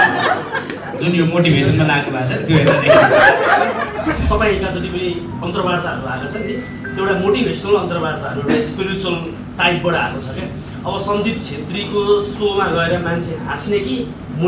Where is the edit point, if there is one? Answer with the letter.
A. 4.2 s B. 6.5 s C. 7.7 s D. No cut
A